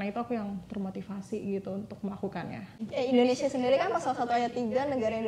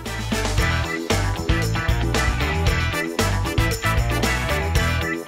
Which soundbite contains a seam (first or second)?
first